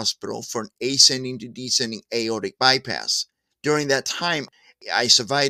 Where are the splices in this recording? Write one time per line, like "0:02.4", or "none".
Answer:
0:04.5